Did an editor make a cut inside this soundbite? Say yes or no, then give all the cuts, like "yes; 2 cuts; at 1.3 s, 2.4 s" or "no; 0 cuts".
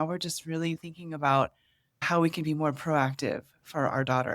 yes; 1 cut; at 2.1 s